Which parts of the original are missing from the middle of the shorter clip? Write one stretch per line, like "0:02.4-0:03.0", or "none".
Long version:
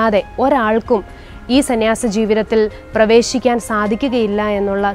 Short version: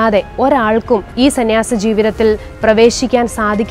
0:01.1-0:01.4